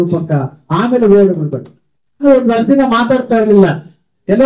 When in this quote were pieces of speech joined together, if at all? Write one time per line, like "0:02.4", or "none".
0:02.2